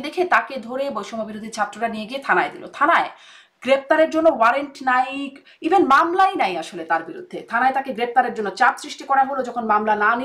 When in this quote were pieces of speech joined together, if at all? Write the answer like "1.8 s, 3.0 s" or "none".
none